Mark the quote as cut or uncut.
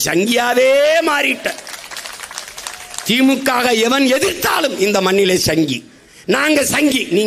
uncut